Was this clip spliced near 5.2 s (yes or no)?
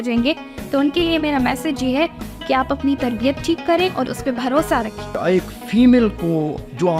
yes